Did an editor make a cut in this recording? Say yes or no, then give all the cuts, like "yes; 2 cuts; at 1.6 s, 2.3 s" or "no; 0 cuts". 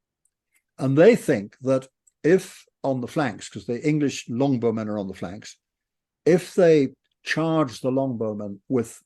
no; 0 cuts